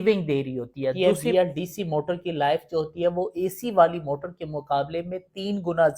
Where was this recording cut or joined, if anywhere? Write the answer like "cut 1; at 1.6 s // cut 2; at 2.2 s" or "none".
cut 1; at 0.9 s